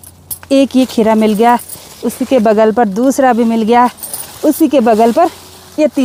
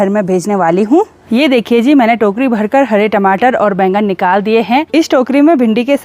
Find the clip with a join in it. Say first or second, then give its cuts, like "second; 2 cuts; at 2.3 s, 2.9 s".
second; 2 cuts; at 1.2 s, 4.9 s